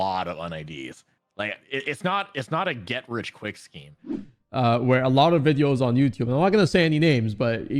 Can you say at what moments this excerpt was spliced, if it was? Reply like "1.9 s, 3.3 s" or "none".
4.2 s